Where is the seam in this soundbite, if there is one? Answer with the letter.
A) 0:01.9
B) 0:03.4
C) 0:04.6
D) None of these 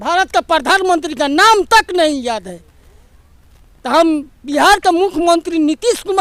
D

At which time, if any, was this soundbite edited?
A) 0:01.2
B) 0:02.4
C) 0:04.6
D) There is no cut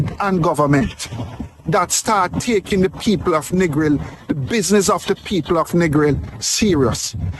D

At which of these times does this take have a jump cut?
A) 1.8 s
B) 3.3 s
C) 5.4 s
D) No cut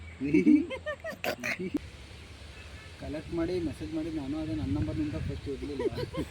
A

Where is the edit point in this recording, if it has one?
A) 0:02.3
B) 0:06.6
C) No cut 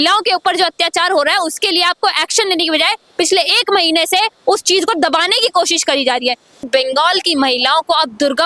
B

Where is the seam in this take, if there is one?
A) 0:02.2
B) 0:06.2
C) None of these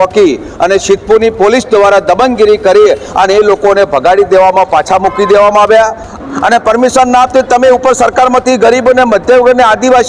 B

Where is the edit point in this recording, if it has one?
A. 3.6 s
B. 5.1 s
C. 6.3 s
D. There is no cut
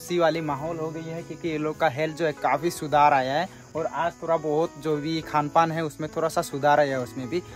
D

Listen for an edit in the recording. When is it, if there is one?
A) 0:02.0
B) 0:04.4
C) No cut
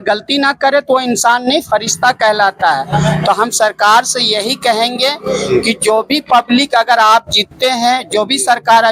C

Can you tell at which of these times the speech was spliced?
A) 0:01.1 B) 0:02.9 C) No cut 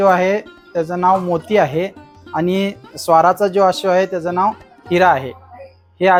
C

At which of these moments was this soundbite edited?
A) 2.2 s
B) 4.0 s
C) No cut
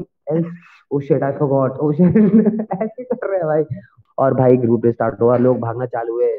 B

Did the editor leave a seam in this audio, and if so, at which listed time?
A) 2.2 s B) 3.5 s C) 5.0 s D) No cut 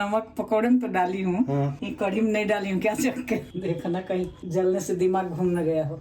B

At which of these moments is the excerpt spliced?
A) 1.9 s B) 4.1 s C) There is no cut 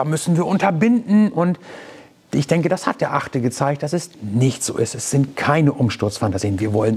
C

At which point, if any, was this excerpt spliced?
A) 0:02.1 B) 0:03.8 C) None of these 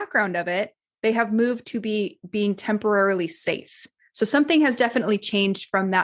B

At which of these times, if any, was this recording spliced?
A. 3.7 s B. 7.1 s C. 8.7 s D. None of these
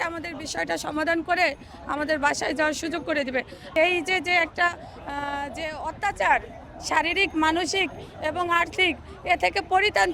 A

